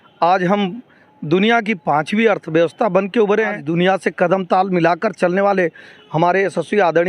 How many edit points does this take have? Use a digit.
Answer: 1